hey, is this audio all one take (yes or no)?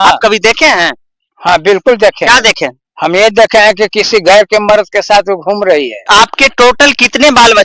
no